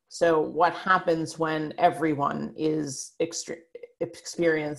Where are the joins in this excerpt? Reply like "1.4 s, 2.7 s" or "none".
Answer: none